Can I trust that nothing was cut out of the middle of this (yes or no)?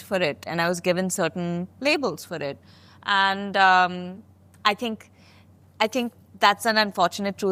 yes